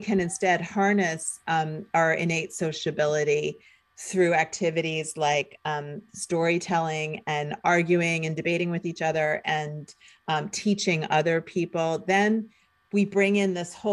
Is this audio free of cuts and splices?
yes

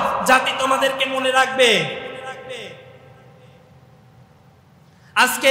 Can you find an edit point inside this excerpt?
no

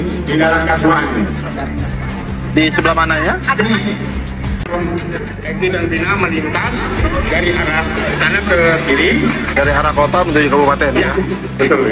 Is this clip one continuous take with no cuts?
yes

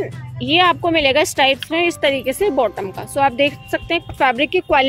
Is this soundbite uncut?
yes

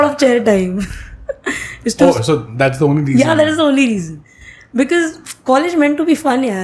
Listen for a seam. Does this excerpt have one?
no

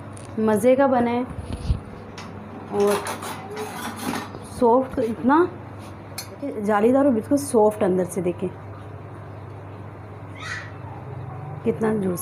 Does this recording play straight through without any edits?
no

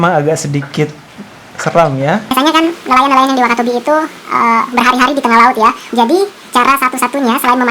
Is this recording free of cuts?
no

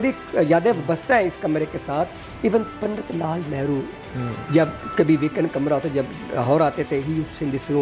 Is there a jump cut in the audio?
no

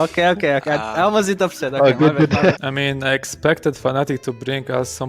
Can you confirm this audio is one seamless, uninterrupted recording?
no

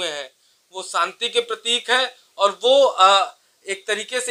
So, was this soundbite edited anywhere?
no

